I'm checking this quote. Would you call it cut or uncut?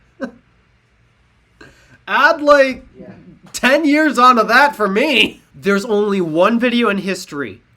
cut